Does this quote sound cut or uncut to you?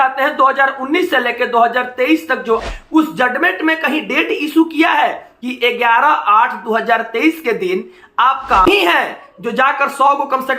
cut